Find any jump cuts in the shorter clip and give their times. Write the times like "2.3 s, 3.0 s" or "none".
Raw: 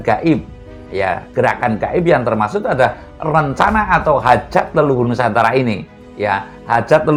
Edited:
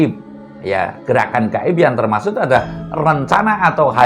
none